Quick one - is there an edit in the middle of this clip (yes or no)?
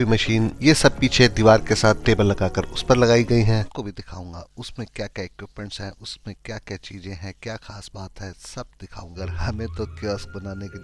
yes